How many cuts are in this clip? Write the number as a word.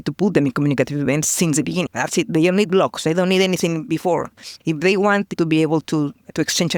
zero